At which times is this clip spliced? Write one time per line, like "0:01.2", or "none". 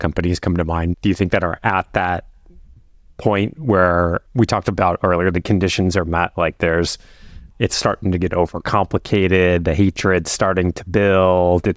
0:00.9